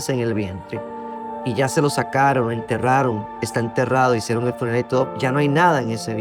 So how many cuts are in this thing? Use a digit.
1